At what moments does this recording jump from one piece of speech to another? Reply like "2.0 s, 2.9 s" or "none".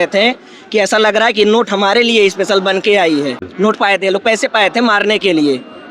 3.4 s